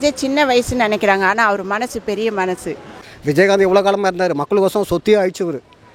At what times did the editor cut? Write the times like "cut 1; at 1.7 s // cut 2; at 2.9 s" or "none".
cut 1; at 3.0 s